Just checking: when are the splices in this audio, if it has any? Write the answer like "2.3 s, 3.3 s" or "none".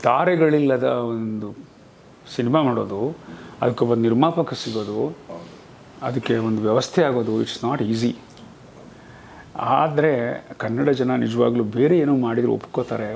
none

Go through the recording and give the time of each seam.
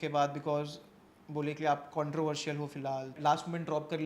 3.1 s

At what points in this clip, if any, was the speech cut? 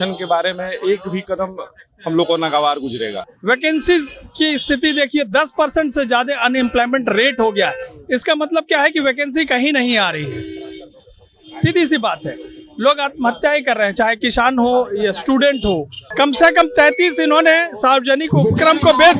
3.3 s, 16.0 s

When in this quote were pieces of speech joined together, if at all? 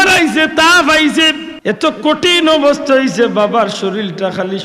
1.5 s

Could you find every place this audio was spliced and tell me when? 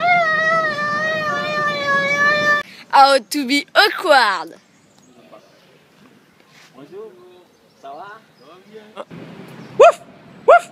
none

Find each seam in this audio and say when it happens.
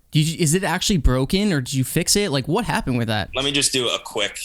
3.3 s

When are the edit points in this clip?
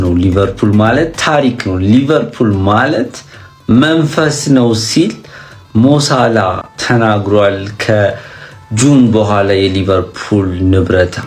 none

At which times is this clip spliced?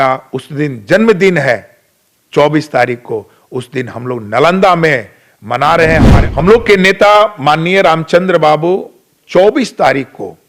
6.1 s

